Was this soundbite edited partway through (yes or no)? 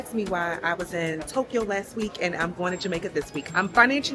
no